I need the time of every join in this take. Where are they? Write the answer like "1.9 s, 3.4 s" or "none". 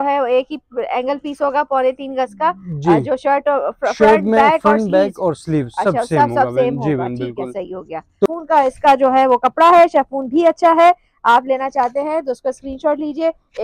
8.3 s